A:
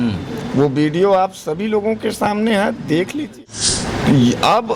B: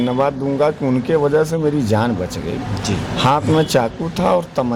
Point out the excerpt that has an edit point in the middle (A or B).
A